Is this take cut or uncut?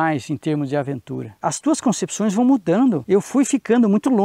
cut